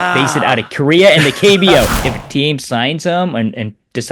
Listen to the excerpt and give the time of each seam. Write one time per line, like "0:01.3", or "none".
0:01.9